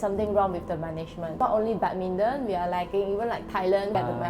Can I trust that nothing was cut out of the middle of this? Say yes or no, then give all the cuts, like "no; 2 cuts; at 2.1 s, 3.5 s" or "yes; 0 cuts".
no; 1 cut; at 1.3 s